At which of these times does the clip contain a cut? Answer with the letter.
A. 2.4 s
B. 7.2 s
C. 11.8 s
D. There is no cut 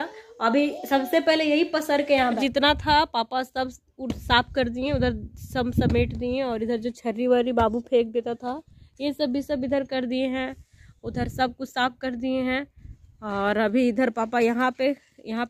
A